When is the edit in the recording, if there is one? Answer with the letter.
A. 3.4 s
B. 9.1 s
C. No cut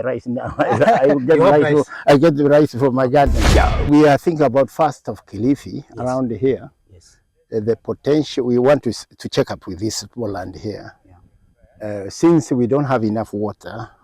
A